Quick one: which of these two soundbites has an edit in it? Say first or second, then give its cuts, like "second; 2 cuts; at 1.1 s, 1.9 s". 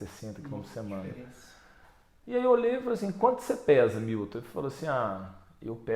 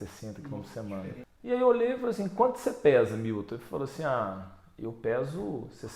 second; 1 cut; at 1.3 s